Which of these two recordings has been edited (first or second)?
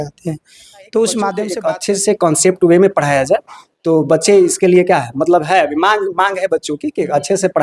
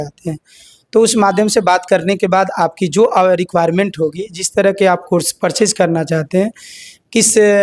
first